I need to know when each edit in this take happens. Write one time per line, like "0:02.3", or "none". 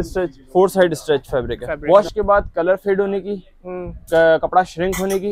0:01.7